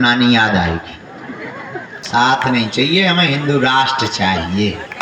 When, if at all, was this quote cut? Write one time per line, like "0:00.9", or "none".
0:02.0